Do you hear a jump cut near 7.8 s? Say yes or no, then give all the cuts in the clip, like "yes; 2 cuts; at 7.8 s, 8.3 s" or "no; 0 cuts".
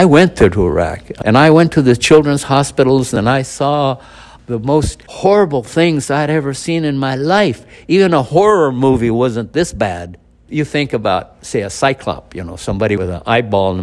no; 5 cuts; at 1.1 s, 3.1 s, 5.0 s, 10.5 s, 13.0 s